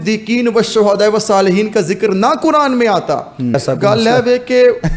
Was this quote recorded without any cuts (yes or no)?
no